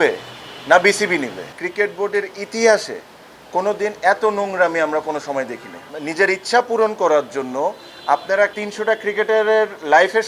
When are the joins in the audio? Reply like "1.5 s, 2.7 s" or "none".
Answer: 1.5 s, 6.0 s, 8.5 s